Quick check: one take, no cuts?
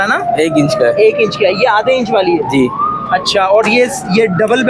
yes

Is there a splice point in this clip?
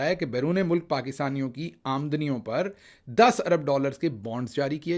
no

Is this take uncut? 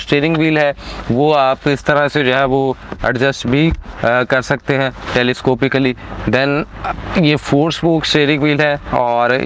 yes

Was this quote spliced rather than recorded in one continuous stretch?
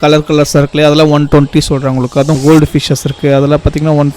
yes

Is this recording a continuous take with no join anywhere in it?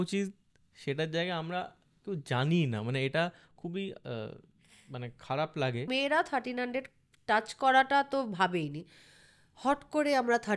no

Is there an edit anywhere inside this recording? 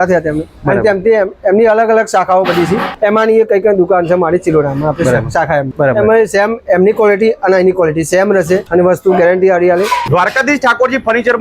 yes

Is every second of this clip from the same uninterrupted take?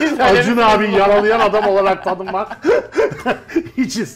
yes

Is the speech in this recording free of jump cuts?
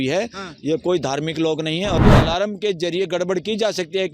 no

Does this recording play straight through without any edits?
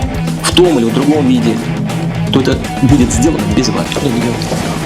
no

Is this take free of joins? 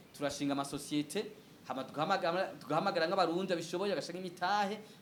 yes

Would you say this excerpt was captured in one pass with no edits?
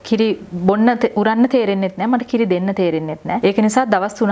no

